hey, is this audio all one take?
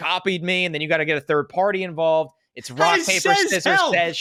yes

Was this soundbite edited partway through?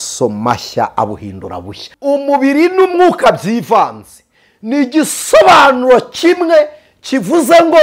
yes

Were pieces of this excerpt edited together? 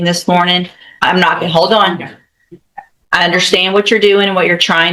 no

